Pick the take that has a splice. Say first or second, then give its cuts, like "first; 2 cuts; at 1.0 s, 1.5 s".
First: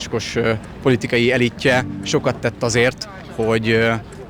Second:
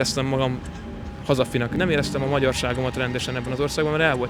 second; 1 cut; at 1.7 s